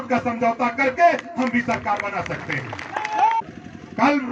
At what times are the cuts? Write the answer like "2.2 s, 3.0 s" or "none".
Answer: 3.4 s